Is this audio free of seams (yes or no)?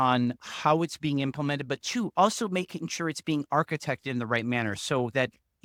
yes